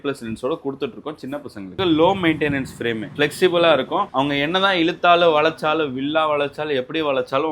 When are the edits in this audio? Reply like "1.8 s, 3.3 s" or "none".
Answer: 1.7 s